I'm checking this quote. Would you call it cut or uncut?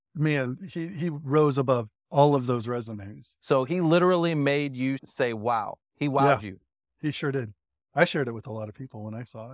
uncut